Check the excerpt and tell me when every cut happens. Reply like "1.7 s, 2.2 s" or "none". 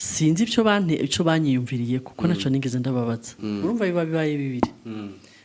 3.6 s